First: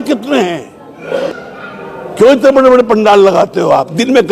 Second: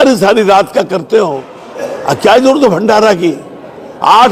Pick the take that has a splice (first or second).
first